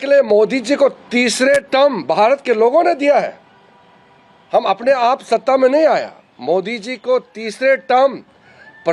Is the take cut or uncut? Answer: uncut